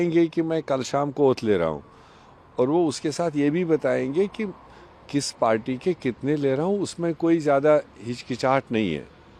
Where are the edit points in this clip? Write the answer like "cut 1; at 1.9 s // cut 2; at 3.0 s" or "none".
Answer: none